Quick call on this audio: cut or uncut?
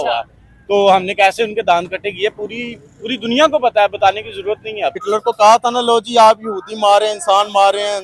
cut